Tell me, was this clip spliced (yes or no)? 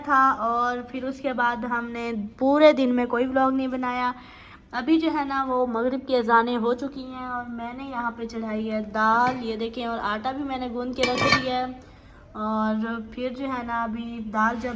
no